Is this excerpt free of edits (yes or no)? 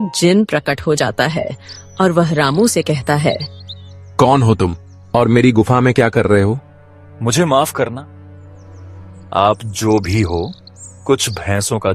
yes